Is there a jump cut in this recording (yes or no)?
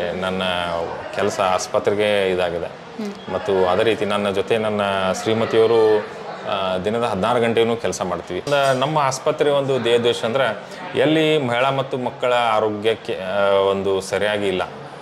yes